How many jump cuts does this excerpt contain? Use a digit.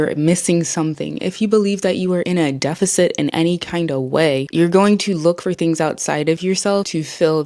0